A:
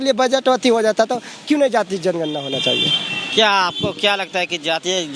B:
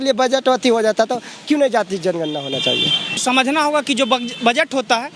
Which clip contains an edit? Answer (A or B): B